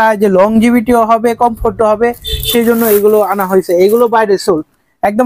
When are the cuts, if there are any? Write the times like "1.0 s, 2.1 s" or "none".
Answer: none